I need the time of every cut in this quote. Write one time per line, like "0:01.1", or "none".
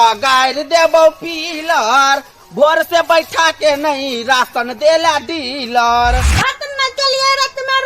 0:06.3